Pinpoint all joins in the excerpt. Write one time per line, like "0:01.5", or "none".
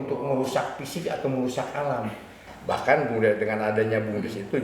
0:02.4